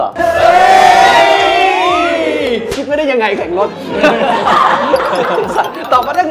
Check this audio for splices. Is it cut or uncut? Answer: uncut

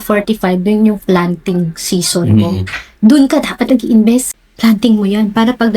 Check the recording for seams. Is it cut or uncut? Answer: cut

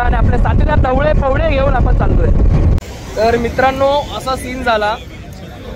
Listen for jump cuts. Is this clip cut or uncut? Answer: cut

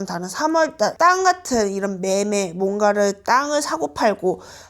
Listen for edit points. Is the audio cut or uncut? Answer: cut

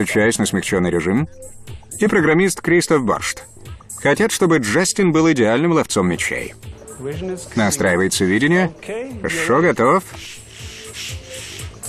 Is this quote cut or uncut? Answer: uncut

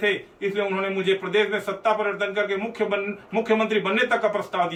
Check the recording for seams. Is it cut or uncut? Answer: uncut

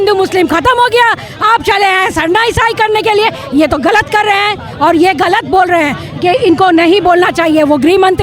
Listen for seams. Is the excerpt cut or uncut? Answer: uncut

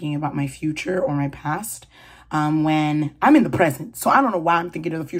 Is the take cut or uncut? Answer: uncut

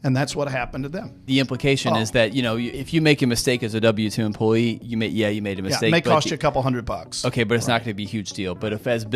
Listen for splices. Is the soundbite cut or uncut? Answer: cut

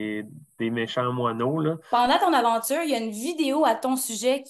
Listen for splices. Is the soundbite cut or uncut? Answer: cut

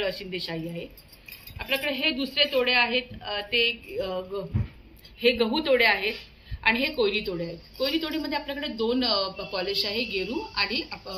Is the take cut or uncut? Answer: uncut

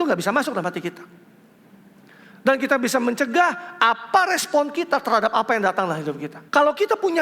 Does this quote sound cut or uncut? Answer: cut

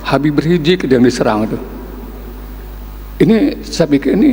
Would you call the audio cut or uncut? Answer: uncut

